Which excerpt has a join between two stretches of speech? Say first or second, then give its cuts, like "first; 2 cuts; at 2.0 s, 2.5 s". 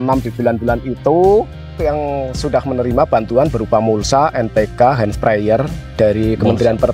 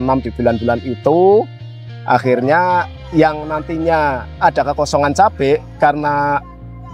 first; 1 cut; at 1.8 s